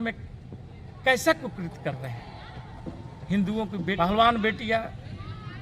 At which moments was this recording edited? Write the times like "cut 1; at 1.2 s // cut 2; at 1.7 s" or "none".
cut 1; at 4.0 s